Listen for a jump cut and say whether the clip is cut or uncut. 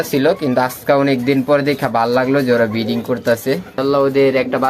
cut